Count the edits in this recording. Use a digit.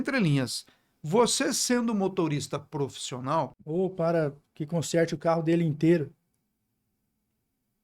1